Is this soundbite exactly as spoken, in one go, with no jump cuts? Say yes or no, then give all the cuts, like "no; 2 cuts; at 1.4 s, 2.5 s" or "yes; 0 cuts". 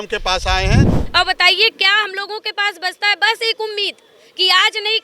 no; 1 cut; at 0.9 s